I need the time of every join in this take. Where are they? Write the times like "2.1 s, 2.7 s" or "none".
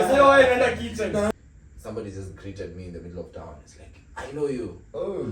1.3 s